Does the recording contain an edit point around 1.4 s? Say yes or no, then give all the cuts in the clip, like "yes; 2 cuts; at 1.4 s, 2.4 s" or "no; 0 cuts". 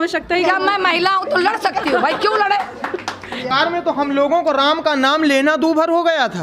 no; 1 cut; at 3.5 s